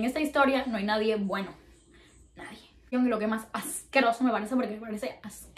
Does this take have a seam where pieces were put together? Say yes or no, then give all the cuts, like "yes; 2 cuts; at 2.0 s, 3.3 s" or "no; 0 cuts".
yes; 1 cut; at 2.9 s